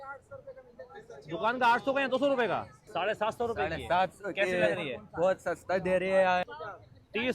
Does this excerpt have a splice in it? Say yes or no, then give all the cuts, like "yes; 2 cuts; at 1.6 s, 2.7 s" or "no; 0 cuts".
yes; 2 cuts; at 2.8 s, 6.4 s